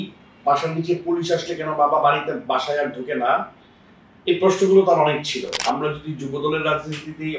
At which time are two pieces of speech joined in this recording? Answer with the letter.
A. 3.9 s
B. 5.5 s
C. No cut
B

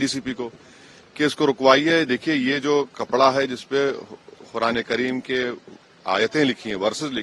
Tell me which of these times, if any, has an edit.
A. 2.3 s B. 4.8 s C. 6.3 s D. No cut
D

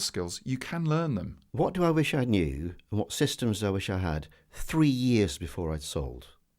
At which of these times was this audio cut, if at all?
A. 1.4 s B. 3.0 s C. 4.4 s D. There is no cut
A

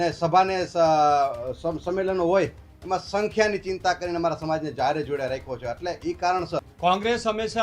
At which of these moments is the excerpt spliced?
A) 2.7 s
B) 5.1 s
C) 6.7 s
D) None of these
C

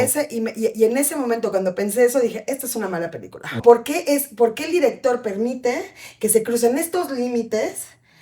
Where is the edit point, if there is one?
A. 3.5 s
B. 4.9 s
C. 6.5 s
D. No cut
A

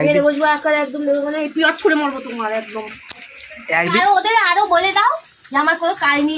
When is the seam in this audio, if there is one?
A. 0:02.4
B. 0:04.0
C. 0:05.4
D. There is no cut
B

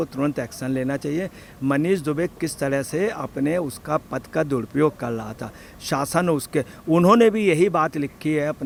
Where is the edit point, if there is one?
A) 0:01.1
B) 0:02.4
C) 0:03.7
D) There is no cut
D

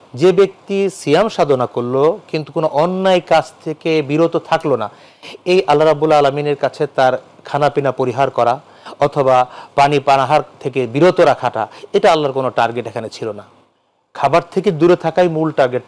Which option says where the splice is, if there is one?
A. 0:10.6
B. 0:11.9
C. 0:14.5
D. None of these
D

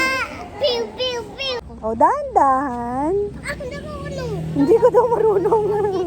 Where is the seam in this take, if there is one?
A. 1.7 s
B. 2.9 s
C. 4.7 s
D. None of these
A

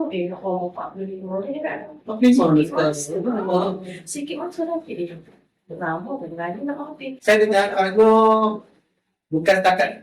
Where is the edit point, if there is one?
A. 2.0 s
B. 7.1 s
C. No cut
B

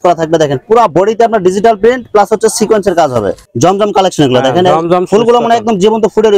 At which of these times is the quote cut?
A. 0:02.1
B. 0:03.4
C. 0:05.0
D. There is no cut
B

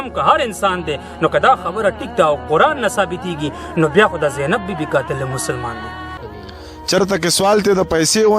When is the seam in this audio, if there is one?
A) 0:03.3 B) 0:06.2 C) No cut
B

